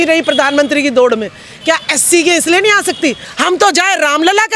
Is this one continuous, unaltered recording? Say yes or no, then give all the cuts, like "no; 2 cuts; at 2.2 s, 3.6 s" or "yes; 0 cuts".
no; 1 cut; at 3.2 s